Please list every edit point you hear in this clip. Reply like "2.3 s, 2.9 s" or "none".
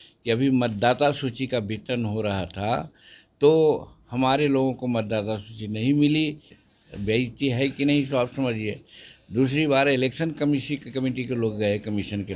6.5 s